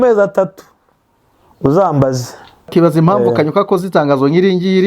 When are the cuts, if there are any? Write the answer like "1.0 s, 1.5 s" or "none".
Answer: 2.7 s